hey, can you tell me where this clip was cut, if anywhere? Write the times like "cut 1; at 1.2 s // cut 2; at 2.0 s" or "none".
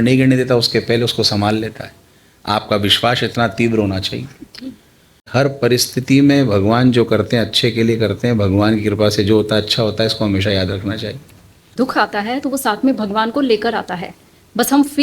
cut 1; at 5.3 s // cut 2; at 11.7 s